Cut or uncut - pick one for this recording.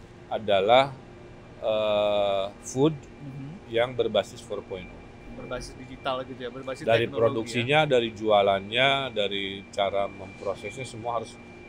uncut